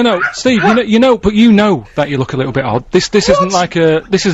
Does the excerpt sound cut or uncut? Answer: uncut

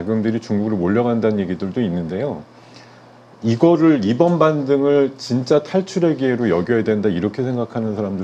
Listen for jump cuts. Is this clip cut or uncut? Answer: uncut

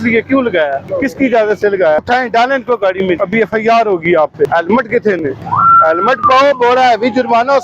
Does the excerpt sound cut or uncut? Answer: cut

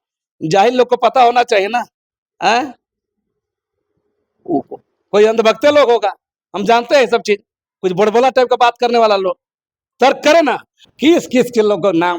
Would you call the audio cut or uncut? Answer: cut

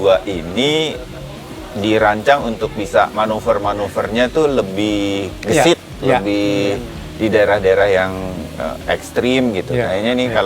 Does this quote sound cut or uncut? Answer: uncut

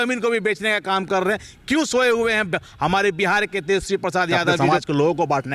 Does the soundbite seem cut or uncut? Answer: cut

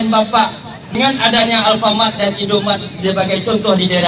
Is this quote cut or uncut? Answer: cut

